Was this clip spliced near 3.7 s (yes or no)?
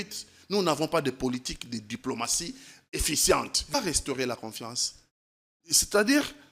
yes